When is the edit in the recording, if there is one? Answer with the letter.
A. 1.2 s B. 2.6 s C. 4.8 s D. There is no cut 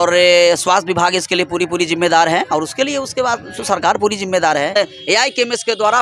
C